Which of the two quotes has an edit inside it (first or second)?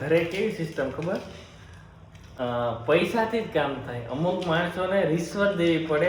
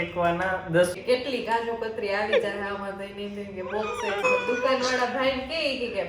second